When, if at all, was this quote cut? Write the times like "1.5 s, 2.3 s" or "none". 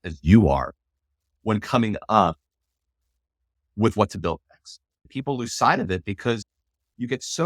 5.1 s, 6.5 s